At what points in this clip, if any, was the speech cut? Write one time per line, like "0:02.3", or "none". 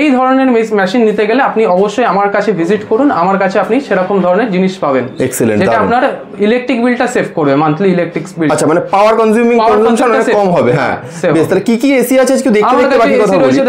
none